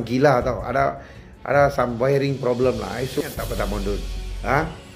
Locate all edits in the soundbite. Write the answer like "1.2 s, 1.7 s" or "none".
3.2 s